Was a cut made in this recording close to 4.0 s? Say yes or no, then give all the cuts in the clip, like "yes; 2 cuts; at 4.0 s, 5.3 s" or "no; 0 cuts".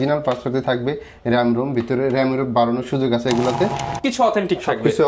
yes; 1 cut; at 4.0 s